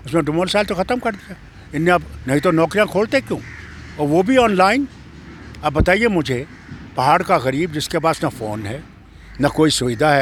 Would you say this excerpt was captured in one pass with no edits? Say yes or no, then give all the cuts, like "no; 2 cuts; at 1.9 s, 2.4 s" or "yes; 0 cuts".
yes; 0 cuts